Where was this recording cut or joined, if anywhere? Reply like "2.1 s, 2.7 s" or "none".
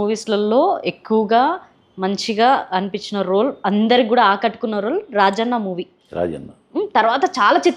none